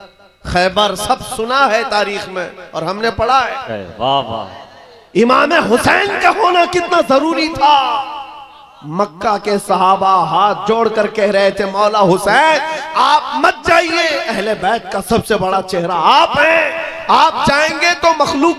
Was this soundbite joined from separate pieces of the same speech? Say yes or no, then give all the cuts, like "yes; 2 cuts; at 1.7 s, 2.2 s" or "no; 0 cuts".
yes; 1 cut; at 3.6 s